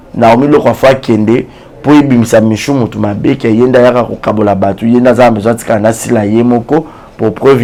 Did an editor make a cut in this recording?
no; 0 cuts

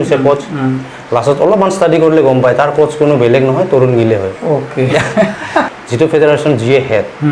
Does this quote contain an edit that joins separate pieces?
yes; 1 cut; at 5.8 s

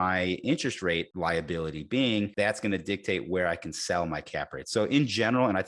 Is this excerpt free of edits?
no; 2 cuts; at 1.1 s, 2.3 s

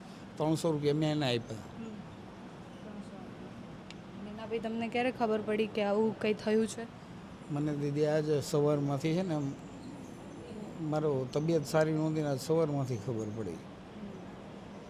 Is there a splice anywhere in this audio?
no; 0 cuts

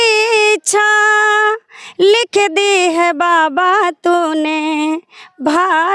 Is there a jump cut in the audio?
no; 0 cuts

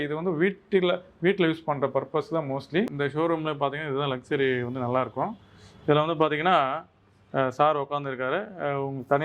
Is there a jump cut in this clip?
yes; 1 cut; at 2.8 s

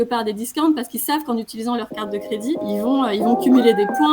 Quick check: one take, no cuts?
no; 1 cut; at 2.6 s

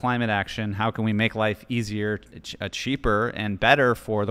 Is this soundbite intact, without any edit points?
yes; 0 cuts

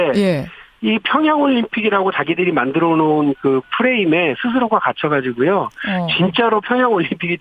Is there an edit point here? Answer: no; 0 cuts

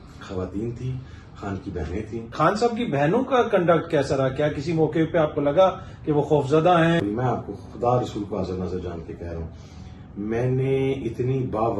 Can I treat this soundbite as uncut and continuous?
no; 2 cuts; at 2.3 s, 7.0 s

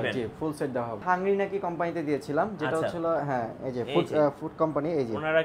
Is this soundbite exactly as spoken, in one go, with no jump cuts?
no; 1 cut; at 1.0 s

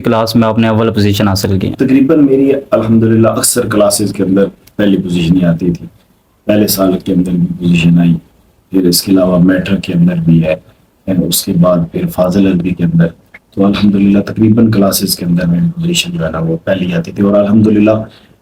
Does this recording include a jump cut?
no; 0 cuts

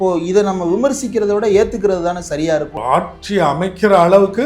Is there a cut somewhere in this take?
yes; 1 cut; at 2.7 s

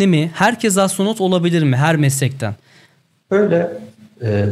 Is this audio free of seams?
yes; 0 cuts

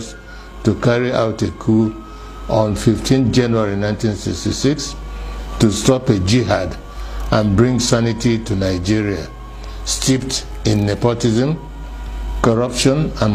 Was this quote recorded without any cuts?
yes; 0 cuts

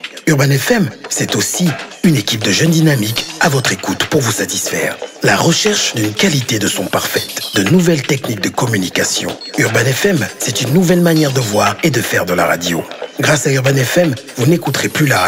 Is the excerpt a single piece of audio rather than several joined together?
yes; 0 cuts

